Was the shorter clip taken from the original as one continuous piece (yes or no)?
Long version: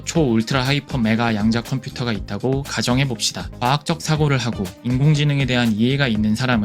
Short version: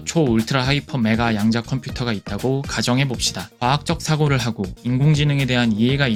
yes